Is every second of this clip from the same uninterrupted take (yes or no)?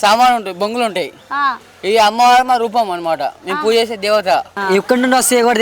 no